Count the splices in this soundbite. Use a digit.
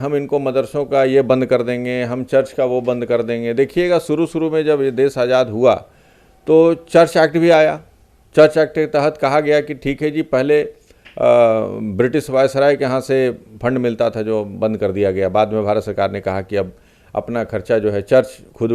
0